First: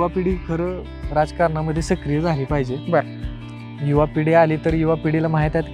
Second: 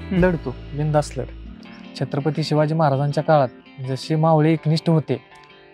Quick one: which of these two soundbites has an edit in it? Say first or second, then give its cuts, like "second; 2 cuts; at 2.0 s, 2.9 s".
second; 1 cut; at 1.4 s